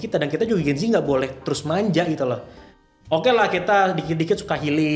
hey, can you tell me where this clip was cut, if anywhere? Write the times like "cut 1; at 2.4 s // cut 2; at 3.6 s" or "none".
none